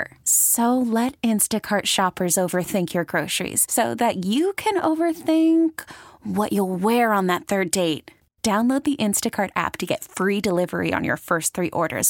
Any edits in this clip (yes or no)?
no